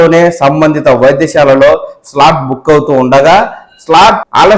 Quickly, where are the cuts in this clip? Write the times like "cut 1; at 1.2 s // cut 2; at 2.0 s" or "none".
none